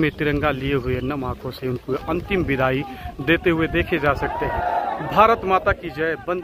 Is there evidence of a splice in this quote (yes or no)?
no